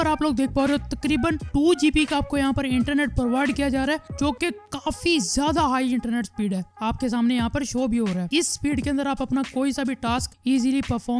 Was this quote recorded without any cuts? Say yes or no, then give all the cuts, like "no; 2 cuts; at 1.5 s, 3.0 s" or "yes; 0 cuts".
yes; 0 cuts